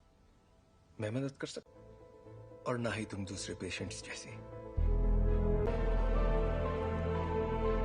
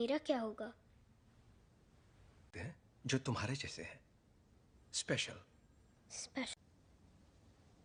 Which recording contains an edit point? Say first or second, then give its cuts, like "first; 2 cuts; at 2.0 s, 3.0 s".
first; 1 cut; at 5.7 s